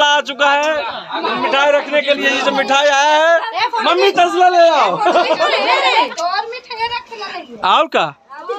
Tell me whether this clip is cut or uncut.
uncut